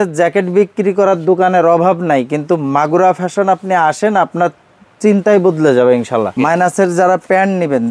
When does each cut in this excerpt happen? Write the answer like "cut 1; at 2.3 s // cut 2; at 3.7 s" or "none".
cut 1; at 6.3 s